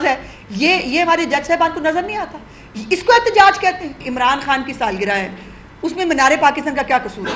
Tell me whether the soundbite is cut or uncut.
cut